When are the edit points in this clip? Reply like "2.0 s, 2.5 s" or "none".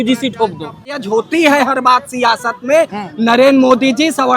1.0 s